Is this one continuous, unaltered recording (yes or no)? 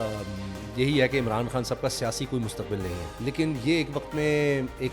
no